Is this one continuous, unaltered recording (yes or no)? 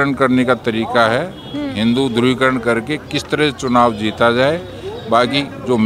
yes